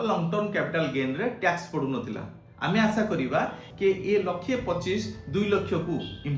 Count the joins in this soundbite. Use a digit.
1